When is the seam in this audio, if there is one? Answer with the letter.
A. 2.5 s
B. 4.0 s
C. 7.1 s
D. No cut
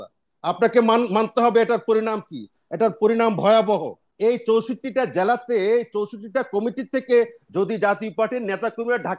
B